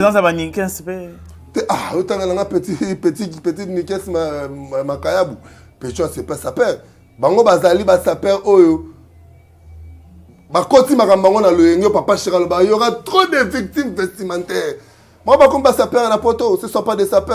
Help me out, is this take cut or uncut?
uncut